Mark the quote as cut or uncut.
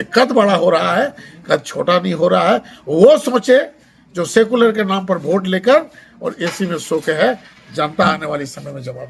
uncut